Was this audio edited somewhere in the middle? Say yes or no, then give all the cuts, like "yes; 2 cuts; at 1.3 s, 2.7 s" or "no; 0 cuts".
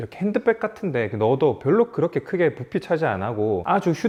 no; 0 cuts